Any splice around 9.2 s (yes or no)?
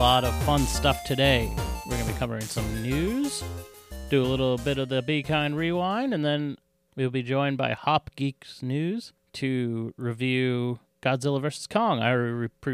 yes